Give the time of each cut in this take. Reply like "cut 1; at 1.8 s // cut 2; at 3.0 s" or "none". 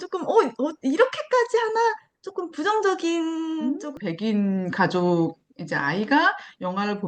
cut 1; at 3.9 s